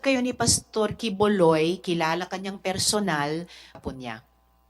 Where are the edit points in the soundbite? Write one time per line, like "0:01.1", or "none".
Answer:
0:03.8